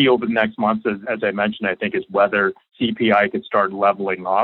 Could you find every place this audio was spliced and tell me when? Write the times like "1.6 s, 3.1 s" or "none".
1.0 s, 2.6 s